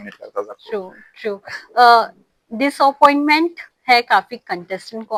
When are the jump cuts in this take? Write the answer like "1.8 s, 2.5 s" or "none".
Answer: none